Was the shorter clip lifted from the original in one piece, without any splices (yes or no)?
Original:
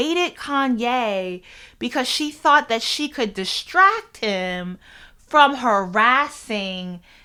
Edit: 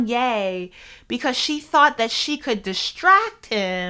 yes